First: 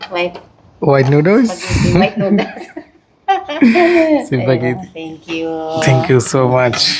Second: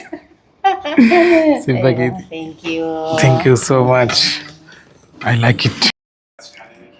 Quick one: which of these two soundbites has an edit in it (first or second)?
second